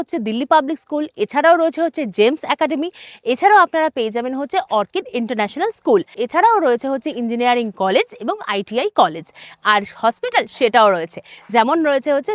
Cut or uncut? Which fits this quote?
uncut